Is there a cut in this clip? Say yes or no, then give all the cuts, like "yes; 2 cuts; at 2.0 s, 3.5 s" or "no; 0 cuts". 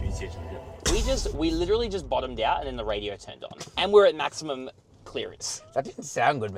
no; 0 cuts